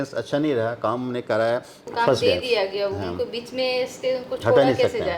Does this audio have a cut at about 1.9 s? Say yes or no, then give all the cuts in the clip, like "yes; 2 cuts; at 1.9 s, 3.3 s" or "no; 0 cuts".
yes; 1 cut; at 1.9 s